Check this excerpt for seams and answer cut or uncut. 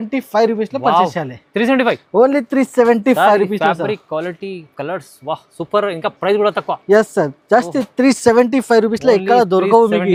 uncut